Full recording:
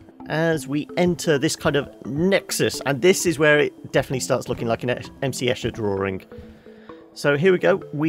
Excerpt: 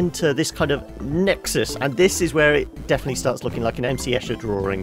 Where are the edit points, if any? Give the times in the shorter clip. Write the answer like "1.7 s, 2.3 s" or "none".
3.9 s